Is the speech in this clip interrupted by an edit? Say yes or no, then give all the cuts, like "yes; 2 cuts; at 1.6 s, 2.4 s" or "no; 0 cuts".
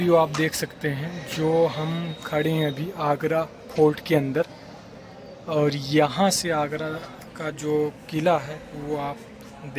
no; 0 cuts